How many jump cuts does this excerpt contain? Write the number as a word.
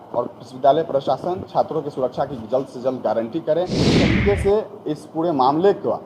one